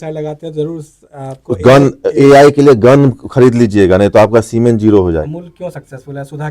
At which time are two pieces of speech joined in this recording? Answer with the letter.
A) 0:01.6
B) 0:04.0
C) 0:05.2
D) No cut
C